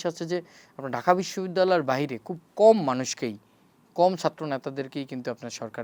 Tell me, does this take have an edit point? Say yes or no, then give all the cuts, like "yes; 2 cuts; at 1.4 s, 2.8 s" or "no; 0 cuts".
no; 0 cuts